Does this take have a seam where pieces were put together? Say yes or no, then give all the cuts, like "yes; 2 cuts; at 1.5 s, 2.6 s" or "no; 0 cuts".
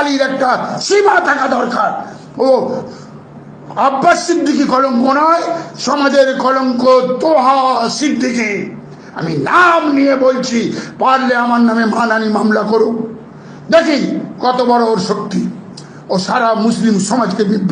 no; 0 cuts